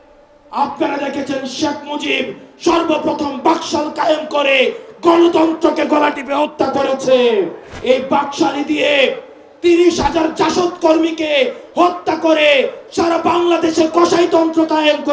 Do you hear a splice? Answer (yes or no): yes